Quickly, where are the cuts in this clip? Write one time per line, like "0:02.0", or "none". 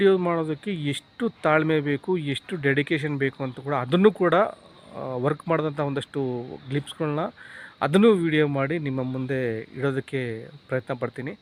none